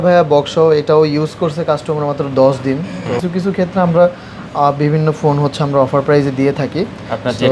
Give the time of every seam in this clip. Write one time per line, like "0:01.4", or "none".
0:03.2